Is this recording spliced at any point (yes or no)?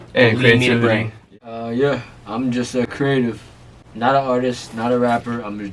yes